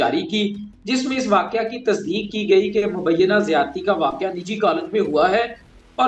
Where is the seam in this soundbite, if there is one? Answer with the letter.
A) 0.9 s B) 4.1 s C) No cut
C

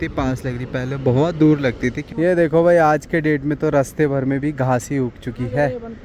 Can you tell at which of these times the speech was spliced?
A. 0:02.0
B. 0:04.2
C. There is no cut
A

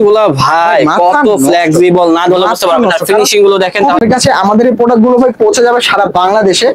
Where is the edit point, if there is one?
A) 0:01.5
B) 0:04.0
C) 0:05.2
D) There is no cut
B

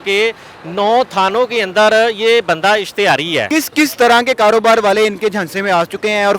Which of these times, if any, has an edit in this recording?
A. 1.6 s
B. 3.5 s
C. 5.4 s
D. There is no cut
B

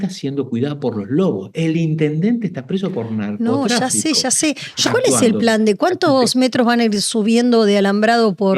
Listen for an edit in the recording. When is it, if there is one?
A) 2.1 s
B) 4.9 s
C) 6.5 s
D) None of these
B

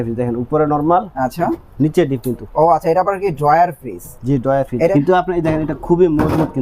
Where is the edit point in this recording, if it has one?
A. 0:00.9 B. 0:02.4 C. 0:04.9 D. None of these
C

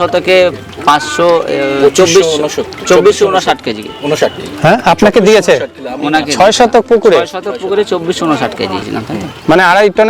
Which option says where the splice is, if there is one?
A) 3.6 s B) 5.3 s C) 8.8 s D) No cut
C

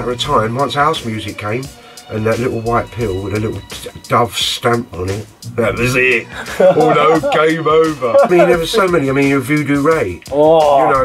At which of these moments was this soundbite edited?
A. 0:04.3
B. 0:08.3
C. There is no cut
B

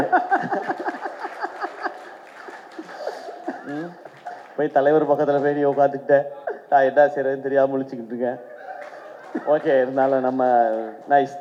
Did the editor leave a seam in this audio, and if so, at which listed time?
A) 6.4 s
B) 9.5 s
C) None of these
C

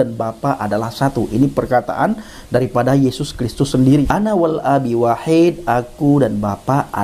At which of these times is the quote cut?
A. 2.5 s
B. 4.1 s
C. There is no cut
B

